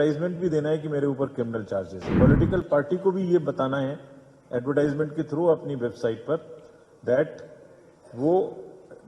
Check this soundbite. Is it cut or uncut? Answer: cut